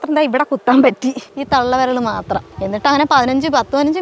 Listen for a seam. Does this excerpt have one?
yes; 2 cuts; at 1.3 s, 2.5 s

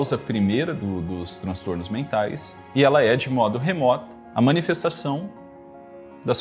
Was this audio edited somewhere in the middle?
yes; 2 cuts; at 2.5 s, 4.2 s

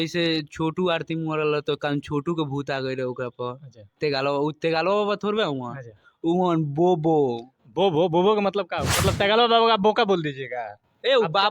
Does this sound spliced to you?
yes; 1 cut; at 8.9 s

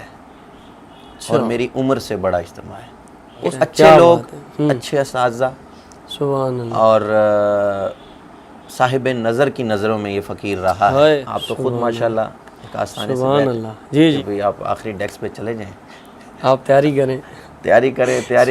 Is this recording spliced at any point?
yes; 3 cuts; at 3.4 s, 11.2 s, 14.2 s

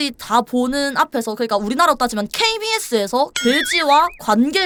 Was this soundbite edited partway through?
no; 0 cuts

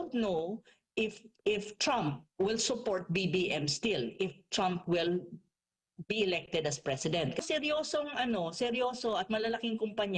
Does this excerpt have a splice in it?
yes; 1 cut; at 7.4 s

